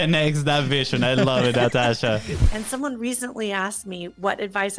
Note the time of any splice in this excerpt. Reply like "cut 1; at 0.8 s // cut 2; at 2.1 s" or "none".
cut 1; at 2.3 s